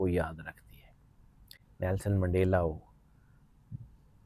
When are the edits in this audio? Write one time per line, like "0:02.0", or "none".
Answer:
none